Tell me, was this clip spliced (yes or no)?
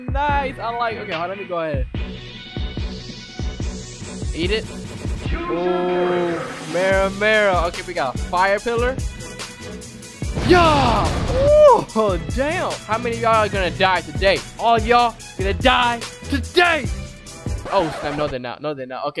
no